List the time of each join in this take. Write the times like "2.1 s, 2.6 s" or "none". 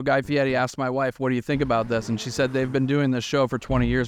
none